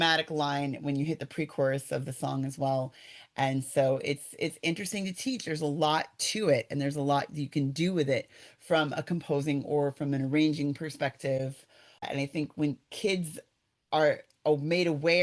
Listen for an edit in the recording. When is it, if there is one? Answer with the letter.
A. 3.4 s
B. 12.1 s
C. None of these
B